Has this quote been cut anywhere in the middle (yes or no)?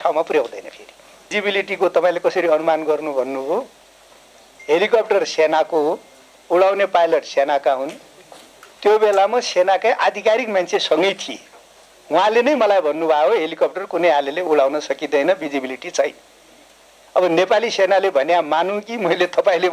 yes